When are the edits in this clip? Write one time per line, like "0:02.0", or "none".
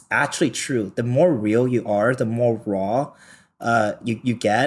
none